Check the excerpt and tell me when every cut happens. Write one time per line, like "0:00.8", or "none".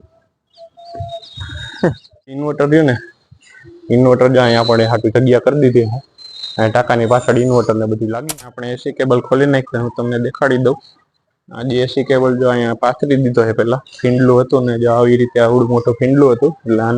0:02.4
0:08.3